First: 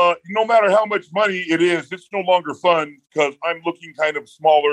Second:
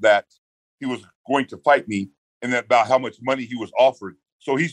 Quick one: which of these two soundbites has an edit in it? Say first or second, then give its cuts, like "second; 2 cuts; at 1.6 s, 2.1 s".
second; 1 cut; at 2.2 s